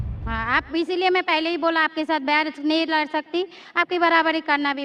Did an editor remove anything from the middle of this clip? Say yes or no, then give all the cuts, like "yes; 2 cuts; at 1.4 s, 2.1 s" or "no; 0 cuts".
no; 0 cuts